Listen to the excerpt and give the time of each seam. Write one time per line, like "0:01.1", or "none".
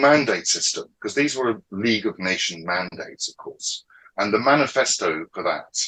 none